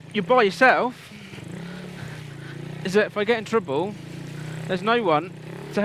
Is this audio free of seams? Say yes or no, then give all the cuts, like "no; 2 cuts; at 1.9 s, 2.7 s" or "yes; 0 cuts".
yes; 0 cuts